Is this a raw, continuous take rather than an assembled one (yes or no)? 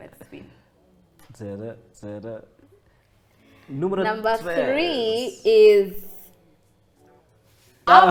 yes